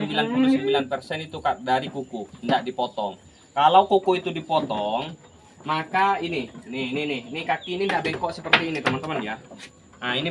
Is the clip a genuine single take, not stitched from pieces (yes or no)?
yes